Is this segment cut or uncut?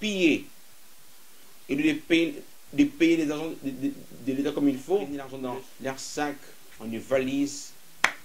cut